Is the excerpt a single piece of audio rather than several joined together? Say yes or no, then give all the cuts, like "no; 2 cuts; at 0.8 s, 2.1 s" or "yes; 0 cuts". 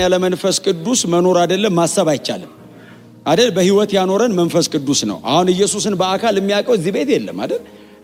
yes; 0 cuts